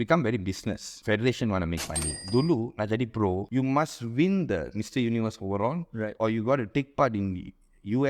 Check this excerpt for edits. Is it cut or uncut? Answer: cut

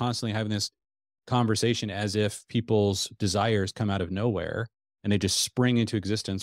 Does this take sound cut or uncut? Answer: uncut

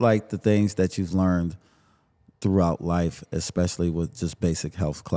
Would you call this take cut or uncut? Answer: uncut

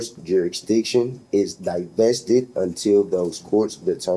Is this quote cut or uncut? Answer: uncut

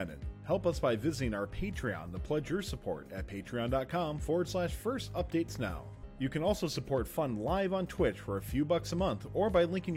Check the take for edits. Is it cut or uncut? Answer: uncut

